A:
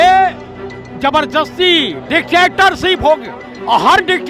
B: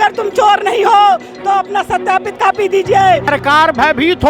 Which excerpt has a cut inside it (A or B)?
B